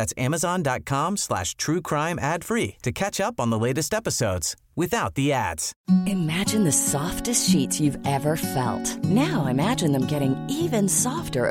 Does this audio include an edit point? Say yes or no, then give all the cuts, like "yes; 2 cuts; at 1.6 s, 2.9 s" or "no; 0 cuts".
yes; 1 cut; at 5.7 s